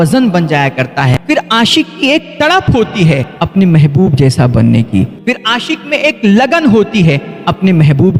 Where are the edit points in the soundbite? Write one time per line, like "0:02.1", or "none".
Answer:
0:01.2
0:03.3